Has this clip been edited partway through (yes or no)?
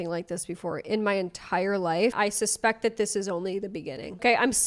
no